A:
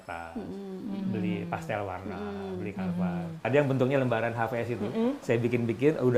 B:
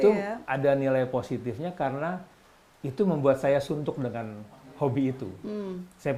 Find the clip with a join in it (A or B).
A